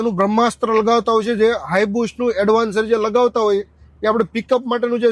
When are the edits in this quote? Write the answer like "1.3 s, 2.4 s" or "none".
none